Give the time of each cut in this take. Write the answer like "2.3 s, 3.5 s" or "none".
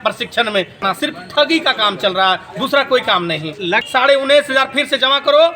1.0 s, 3.8 s